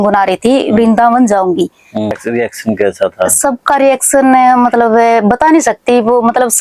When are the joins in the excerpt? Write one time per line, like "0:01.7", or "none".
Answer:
0:02.2